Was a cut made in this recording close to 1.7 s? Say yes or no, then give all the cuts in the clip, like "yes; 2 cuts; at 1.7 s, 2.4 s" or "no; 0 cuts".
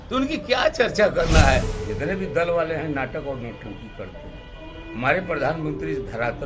yes; 1 cut; at 1.7 s